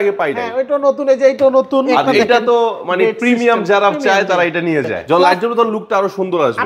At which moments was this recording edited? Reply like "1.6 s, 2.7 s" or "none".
2.1 s, 5.0 s